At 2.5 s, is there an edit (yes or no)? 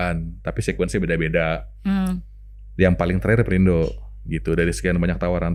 no